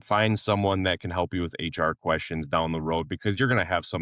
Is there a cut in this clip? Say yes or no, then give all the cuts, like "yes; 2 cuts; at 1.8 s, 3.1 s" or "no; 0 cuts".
no; 0 cuts